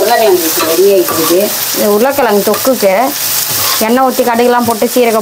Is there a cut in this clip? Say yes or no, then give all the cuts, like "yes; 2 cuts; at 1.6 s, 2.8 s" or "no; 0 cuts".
no; 0 cuts